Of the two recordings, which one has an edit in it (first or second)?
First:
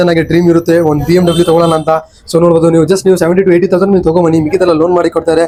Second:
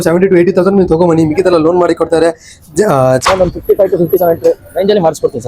second